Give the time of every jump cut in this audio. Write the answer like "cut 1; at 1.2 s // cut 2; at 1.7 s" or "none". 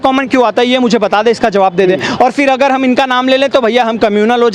none